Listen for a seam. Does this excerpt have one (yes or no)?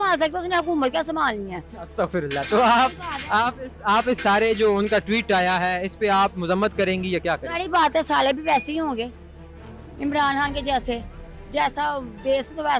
no